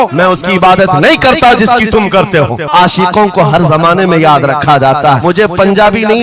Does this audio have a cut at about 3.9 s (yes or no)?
no